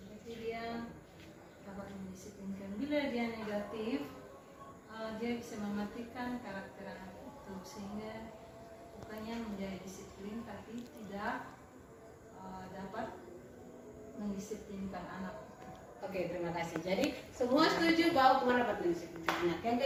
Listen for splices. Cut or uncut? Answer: uncut